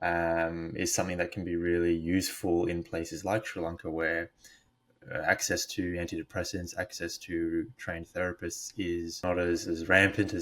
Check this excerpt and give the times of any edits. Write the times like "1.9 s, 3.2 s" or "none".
9.2 s